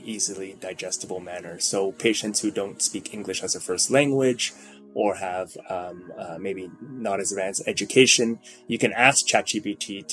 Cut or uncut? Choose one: uncut